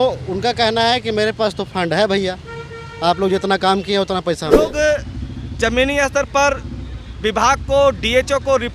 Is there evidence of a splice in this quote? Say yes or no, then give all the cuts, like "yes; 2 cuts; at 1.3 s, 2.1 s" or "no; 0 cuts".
yes; 1 cut; at 4.6 s